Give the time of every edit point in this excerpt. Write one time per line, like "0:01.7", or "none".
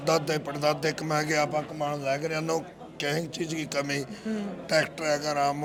none